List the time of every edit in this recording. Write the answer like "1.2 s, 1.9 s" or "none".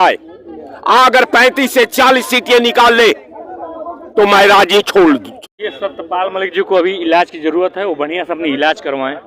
5.3 s